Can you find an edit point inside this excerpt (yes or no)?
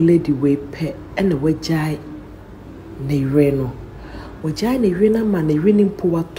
no